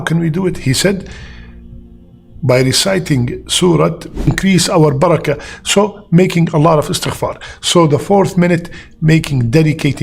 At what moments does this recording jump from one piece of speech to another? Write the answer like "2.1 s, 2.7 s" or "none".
4.3 s